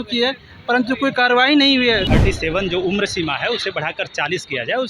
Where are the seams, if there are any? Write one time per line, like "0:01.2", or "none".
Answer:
0:02.1